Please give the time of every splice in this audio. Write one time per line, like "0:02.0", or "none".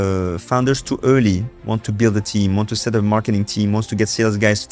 none

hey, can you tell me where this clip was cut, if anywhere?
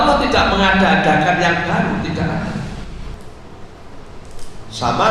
0:03.1

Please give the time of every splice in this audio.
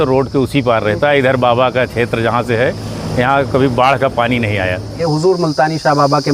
0:05.0

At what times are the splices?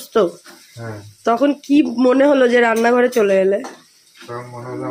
none

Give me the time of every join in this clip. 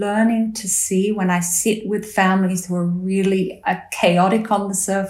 none

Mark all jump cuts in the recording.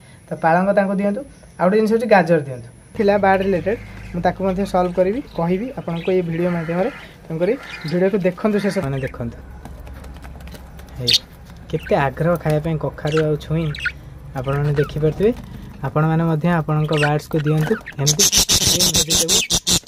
0:02.9
0:08.8

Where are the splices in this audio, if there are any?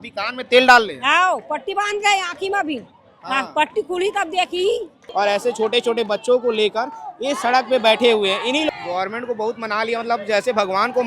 0:05.0
0:08.7

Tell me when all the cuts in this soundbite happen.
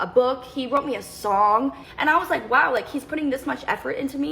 0:01.9

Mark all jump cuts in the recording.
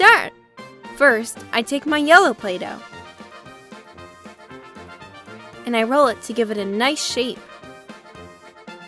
none

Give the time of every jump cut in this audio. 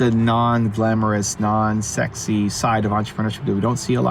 none

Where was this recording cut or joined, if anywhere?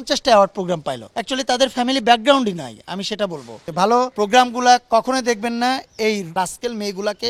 0:01.1
0:03.8
0:06.3

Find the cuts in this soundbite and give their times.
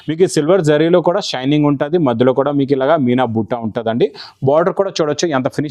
none

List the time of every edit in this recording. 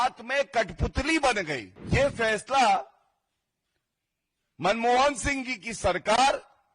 0:01.7

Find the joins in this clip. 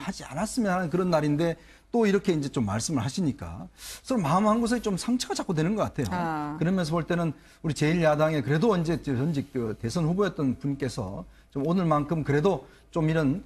0:02.9

